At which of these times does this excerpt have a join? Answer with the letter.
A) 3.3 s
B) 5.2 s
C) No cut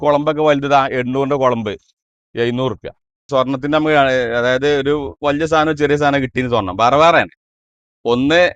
A